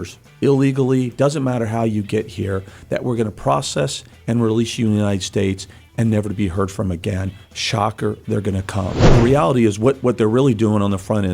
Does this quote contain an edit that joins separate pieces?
yes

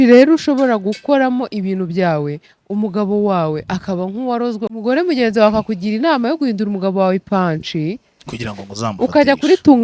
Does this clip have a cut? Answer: yes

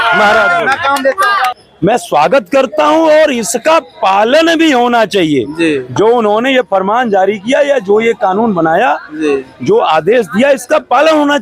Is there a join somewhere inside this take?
yes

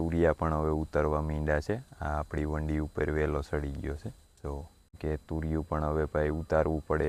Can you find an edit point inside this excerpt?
no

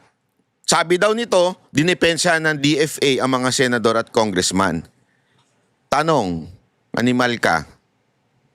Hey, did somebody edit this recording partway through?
no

